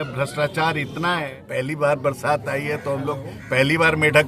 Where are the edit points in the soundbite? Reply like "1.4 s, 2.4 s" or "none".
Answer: 1.3 s